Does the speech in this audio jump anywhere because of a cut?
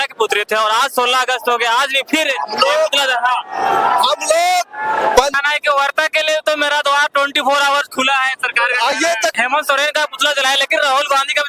yes; 2 cuts; at 5.4 s, 9.3 s

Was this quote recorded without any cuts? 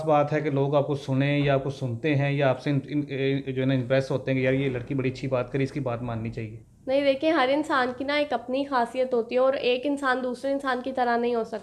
yes; 0 cuts

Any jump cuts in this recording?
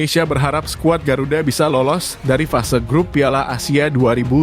no; 0 cuts

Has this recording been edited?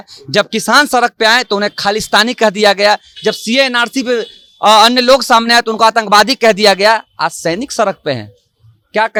no; 0 cuts

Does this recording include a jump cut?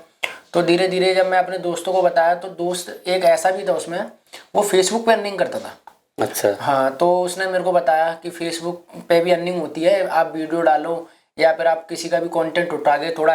no; 0 cuts

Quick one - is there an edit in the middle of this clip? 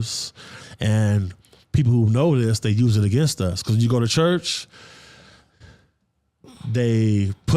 no; 0 cuts

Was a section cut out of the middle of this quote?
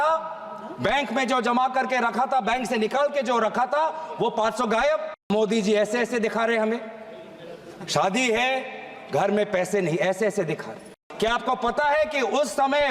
yes; 2 cuts; at 5.3 s, 11.0 s

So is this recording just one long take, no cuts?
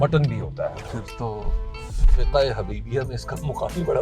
no; 1 cut; at 0.9 s

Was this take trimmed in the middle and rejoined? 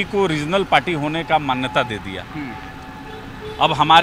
no; 0 cuts

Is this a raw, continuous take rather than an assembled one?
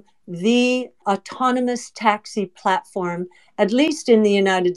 no; 1 cut; at 1.0 s

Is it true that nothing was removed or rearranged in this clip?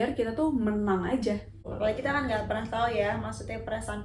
no; 1 cut; at 1.6 s

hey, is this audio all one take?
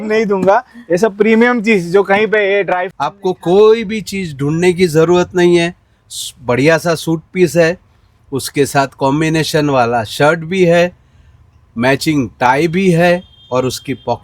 no; 1 cut; at 2.9 s

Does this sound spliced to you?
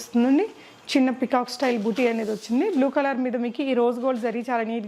no; 0 cuts

